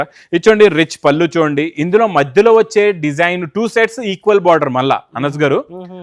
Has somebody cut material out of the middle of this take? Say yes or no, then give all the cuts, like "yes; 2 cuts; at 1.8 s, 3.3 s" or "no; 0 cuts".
no; 0 cuts